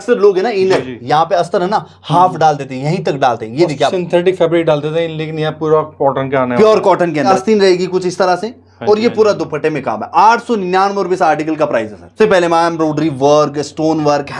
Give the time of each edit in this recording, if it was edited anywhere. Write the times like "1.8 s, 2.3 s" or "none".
7.3 s, 12.1 s